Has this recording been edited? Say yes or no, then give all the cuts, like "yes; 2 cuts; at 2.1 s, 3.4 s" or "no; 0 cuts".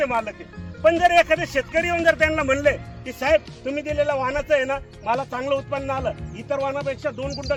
no; 0 cuts